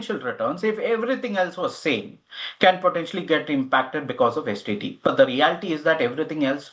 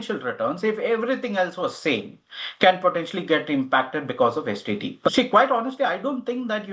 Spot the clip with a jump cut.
second; 1 cut; at 5.1 s

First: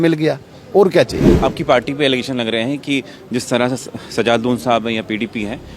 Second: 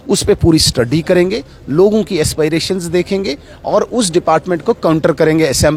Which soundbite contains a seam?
first; 1 cut; at 1.3 s

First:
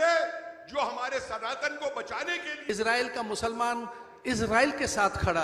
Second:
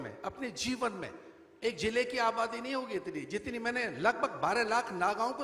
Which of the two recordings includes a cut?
first; 1 cut; at 2.7 s

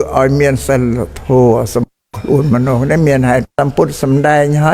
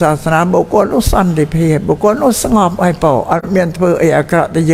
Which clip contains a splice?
first; 1 cut; at 3.5 s

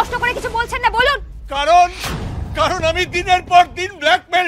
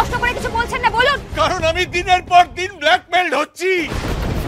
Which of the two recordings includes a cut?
second; 1 cut; at 1.2 s

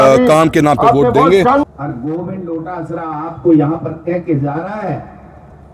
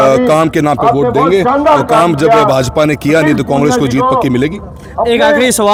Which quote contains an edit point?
first; 1 cut; at 1.6 s

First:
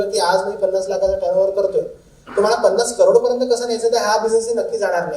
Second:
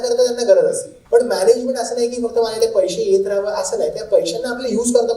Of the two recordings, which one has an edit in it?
second; 1 cut; at 0.9 s

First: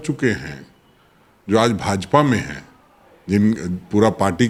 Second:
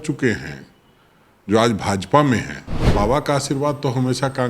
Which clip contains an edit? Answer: second; 1 cut; at 2.8 s

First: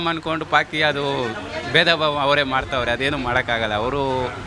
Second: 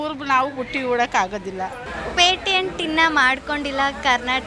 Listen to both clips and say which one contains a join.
second; 1 cut; at 1.9 s

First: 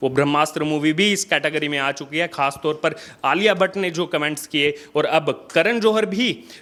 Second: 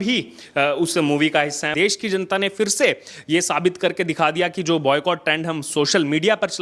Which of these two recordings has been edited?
second; 1 cut; at 1.7 s

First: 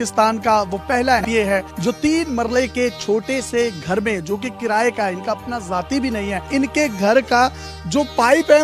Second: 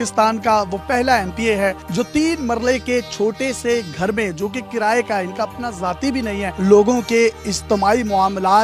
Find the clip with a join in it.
first; 2 cuts; at 1.2 s, 6.4 s

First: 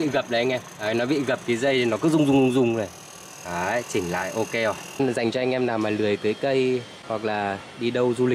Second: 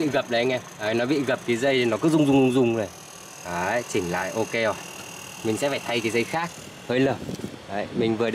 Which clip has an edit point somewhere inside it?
first; 2 cuts; at 4.9 s, 7.0 s

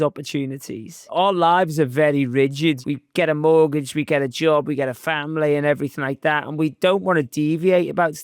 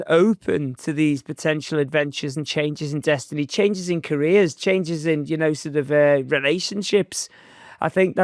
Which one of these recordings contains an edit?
first; 2 cuts; at 1.1 s, 2.8 s

